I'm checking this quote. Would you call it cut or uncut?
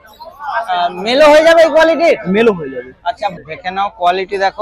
cut